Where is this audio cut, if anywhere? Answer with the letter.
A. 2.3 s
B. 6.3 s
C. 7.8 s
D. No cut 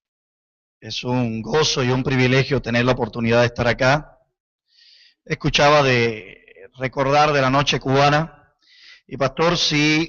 D